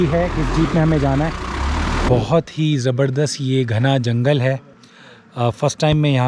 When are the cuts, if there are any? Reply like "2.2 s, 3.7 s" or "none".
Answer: 2.1 s